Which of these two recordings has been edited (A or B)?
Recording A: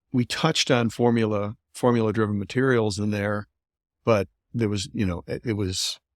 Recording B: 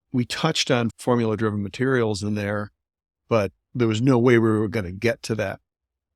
B